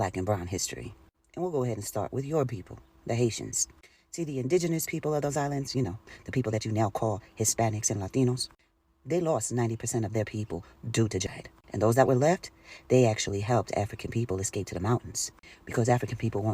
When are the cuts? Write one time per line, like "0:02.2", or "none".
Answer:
0:11.3